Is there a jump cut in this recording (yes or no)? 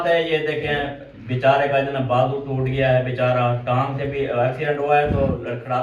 no